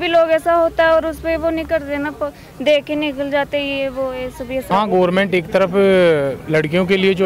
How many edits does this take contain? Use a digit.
0